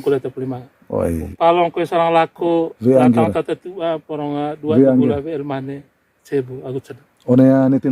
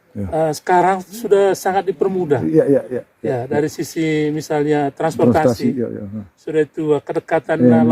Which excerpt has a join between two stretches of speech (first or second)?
first